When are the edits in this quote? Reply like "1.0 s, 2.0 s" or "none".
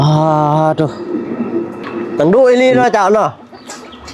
2.1 s